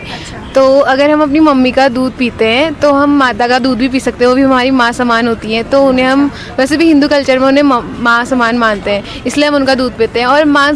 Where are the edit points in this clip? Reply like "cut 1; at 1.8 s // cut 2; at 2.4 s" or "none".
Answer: none